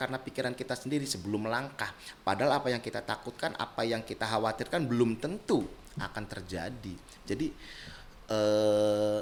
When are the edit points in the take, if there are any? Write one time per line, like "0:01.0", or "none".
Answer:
none